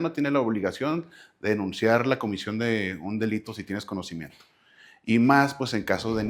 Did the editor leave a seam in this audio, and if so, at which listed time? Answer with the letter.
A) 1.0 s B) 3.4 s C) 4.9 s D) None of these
D